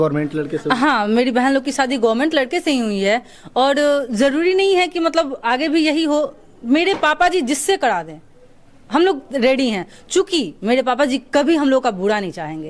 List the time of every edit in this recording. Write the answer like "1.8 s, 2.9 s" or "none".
none